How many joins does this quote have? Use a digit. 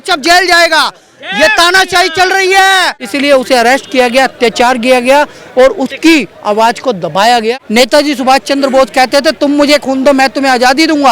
2